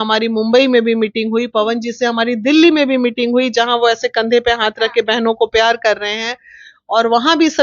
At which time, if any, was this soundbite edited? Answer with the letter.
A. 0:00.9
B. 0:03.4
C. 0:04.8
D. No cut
D